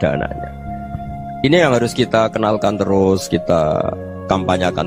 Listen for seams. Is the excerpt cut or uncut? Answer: uncut